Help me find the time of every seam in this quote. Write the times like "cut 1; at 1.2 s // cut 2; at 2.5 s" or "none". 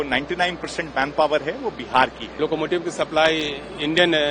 cut 1; at 2.4 s